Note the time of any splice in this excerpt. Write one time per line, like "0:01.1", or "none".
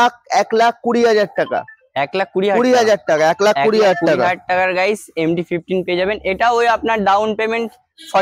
none